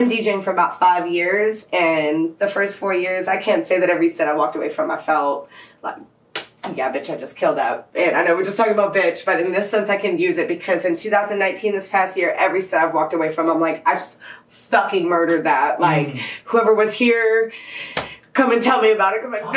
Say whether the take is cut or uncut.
uncut